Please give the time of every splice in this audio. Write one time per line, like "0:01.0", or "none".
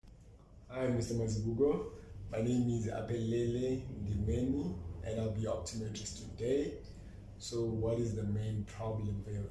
none